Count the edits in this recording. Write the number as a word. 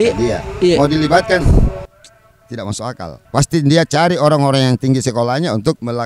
zero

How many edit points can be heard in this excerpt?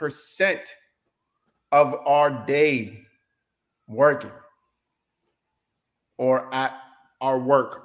zero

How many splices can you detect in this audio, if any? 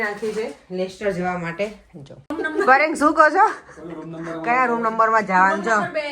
one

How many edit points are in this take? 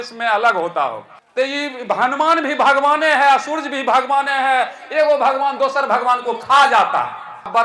zero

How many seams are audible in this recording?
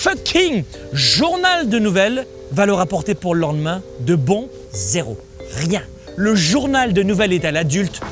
three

